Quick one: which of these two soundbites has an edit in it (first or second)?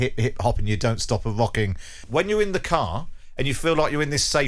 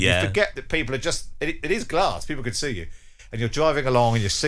first